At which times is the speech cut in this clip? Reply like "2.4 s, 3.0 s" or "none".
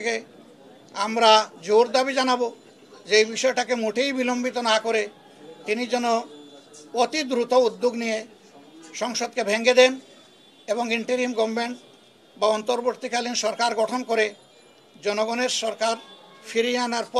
none

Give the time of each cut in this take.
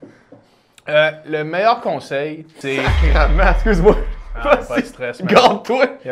2.5 s

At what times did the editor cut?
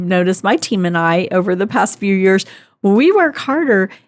none

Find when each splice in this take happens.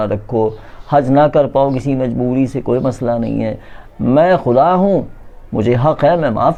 none

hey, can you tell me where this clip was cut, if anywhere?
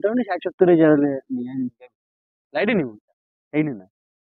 2.6 s

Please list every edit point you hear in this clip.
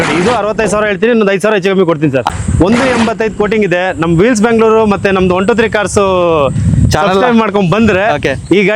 2.3 s

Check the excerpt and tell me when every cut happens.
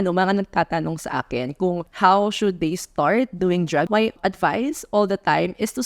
1.9 s, 4.1 s

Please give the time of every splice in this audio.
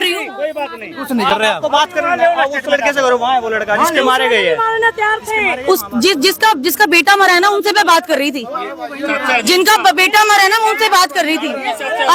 none

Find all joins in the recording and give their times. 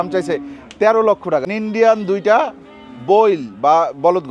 1.5 s

